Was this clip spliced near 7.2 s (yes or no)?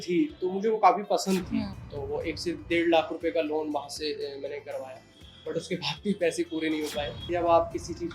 yes